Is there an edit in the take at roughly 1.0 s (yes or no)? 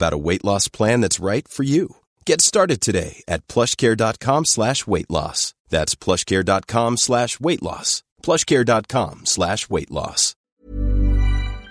no